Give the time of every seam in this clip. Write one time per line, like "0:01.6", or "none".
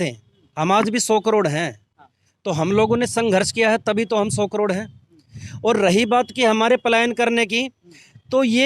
none

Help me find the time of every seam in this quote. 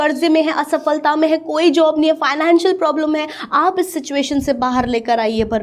none

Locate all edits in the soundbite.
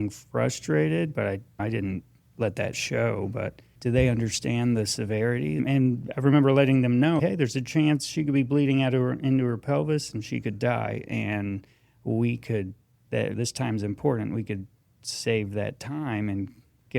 0:03.7
0:05.6
0:07.2

